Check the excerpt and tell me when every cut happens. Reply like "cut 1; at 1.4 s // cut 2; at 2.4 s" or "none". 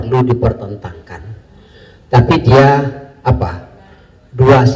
none